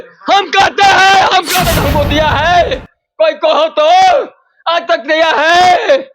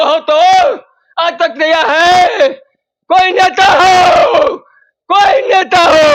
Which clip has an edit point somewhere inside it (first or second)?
first